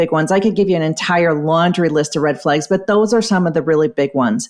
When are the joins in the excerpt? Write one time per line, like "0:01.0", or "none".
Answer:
none

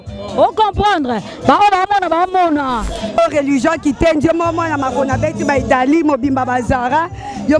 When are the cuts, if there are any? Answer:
0:03.2

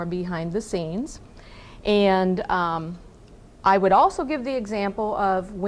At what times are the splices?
none

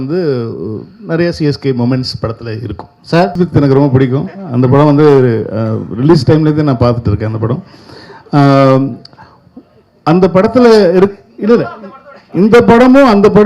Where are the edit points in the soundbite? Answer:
0:03.3

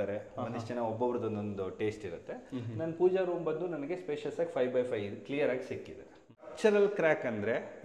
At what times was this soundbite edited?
0:06.5

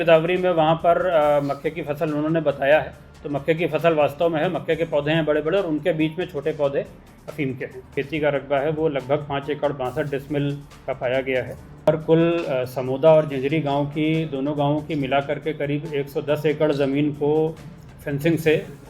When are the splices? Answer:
0:07.9
0:11.9

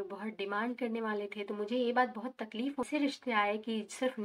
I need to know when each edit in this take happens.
0:02.9

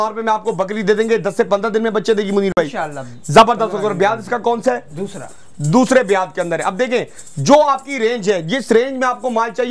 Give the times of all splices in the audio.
none

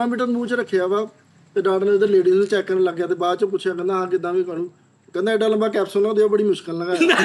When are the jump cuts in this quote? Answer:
none

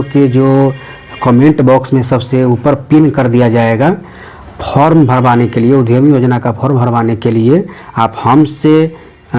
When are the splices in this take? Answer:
none

